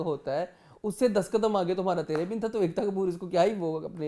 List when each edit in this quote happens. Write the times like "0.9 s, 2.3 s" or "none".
none